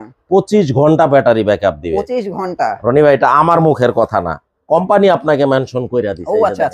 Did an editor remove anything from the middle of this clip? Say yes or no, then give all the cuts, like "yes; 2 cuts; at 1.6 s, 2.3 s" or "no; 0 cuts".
no; 0 cuts